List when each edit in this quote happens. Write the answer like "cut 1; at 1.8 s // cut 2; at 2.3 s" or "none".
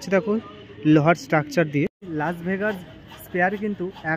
cut 1; at 2.0 s